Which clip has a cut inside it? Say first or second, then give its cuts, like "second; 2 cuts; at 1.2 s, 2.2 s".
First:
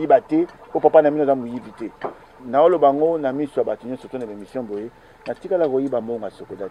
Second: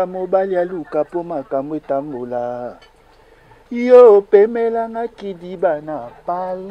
first; 1 cut; at 2.4 s